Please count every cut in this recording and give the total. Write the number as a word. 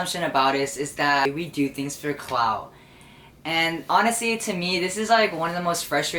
one